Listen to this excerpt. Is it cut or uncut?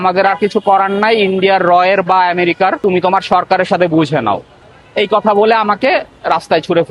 cut